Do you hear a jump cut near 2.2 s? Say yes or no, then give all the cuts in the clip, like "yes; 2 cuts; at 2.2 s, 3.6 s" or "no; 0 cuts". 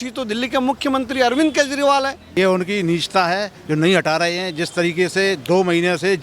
yes; 1 cut; at 2.2 s